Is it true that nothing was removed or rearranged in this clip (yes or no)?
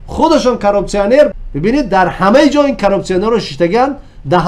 no